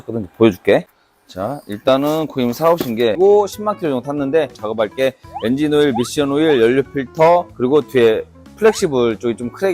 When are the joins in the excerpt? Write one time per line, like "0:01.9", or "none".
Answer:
0:03.2
0:04.6